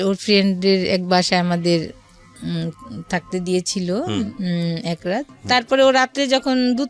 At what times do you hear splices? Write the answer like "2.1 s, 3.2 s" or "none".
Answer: 5.3 s